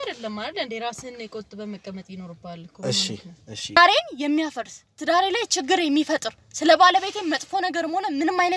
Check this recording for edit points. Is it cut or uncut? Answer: cut